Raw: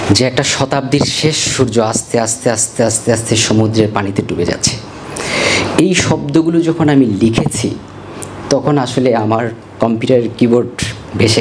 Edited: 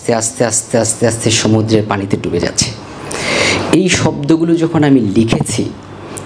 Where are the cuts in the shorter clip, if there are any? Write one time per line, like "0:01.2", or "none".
none